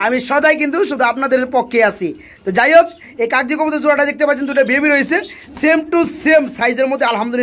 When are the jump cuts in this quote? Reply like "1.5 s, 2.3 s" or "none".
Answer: none

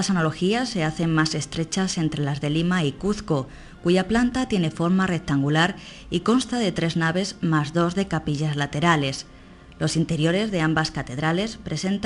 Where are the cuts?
3.9 s

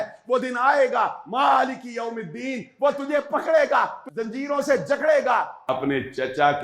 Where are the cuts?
4.0 s, 5.7 s

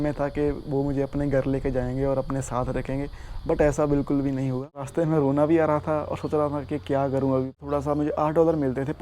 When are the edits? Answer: 4.9 s, 7.5 s

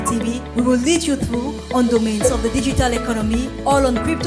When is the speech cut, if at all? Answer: 3.3 s

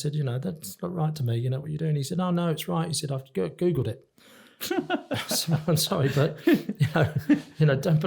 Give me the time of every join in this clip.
none

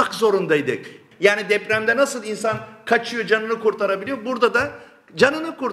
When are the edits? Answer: 0.9 s

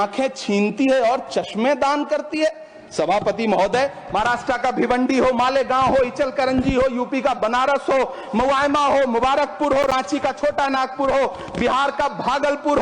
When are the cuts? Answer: none

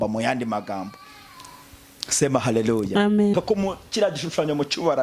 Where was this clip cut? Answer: 3.3 s

